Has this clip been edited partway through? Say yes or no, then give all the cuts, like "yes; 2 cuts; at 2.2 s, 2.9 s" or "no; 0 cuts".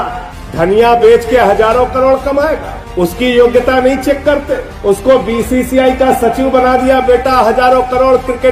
no; 0 cuts